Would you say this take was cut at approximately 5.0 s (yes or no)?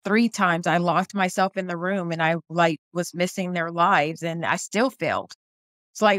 no